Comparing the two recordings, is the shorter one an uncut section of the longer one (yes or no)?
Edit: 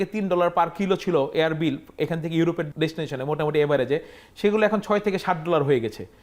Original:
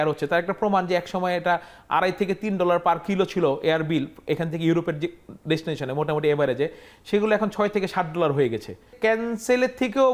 no